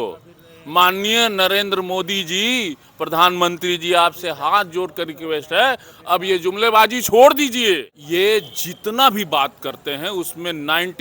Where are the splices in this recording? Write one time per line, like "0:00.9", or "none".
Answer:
0:07.9